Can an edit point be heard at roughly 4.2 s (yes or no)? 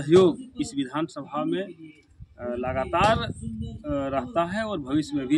no